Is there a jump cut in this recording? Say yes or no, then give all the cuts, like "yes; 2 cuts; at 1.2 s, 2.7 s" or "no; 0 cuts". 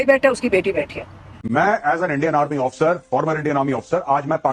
yes; 1 cut; at 1.4 s